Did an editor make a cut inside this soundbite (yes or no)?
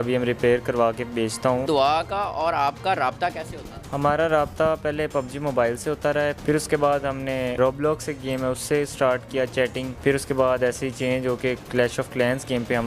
yes